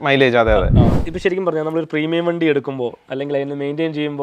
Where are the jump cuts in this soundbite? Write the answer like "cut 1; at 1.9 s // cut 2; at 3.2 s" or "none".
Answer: cut 1; at 1.0 s